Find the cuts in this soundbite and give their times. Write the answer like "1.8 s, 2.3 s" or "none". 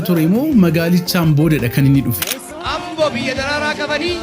2.2 s

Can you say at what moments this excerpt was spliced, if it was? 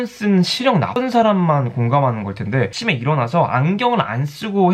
none

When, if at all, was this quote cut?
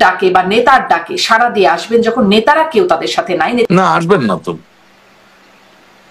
3.7 s

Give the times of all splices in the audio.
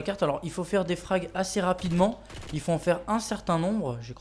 1.3 s

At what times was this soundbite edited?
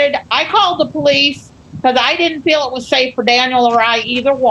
none

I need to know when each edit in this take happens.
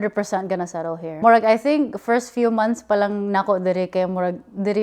1.1 s

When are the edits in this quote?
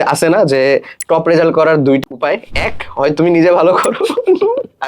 2.0 s

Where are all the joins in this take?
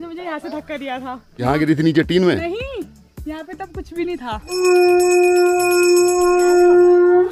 1.4 s, 4.5 s

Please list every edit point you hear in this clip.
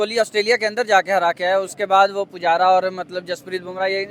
none

